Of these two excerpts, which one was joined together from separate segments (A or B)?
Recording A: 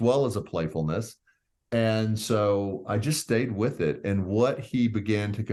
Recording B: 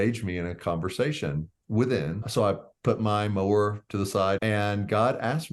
B